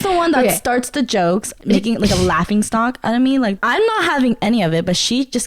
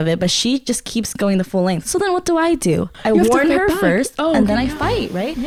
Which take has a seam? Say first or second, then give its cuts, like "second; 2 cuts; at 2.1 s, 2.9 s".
first; 2 cuts; at 1.5 s, 3.6 s